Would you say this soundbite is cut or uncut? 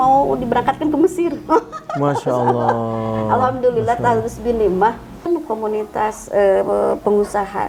cut